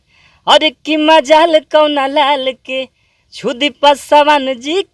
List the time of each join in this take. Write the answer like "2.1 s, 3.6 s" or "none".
none